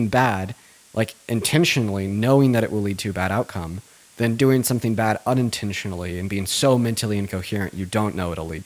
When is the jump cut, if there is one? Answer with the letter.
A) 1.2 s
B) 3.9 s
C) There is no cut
C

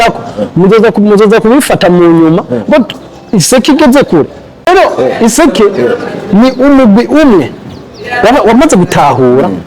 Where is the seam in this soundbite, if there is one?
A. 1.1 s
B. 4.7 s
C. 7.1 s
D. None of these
B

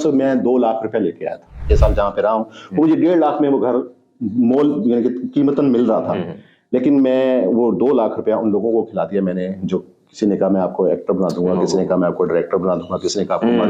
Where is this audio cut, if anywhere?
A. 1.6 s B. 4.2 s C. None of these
A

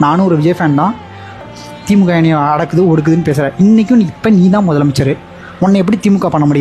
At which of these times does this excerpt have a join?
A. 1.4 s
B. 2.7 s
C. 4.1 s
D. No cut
A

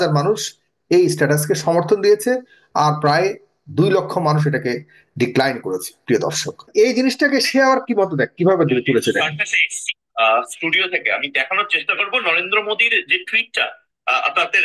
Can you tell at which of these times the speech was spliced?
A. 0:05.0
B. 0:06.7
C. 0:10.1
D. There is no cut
B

